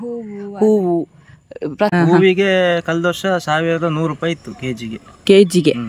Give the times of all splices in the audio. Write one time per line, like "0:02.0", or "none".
0:01.9